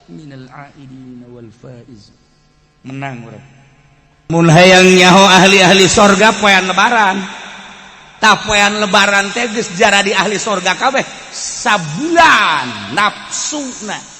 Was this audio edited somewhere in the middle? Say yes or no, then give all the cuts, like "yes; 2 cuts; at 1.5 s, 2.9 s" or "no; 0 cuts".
yes; 1 cut; at 4.3 s